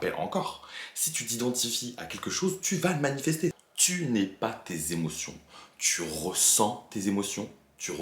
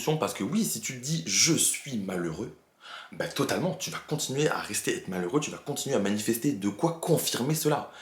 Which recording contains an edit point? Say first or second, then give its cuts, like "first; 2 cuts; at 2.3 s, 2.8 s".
first; 1 cut; at 3.7 s